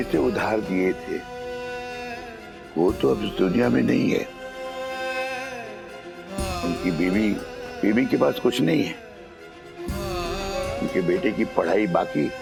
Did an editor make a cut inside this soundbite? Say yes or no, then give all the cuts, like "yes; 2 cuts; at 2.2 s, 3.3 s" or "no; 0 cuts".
no; 0 cuts